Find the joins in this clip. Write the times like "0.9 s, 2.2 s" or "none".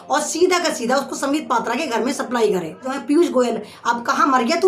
2.9 s